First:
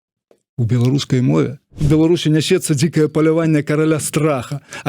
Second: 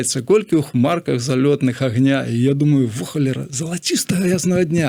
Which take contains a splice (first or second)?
first